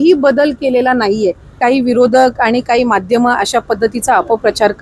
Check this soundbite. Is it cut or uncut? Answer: cut